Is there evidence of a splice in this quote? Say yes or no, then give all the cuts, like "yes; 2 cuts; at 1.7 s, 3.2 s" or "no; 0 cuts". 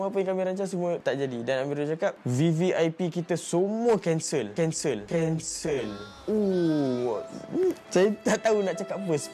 no; 0 cuts